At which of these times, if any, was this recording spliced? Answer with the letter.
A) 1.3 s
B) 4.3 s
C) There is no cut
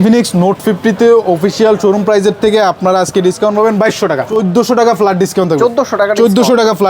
B